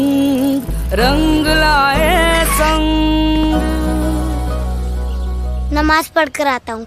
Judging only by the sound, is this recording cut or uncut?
uncut